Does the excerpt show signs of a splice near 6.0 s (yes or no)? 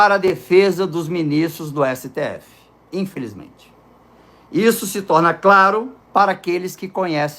yes